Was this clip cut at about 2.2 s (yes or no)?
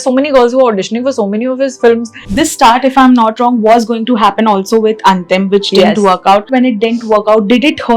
yes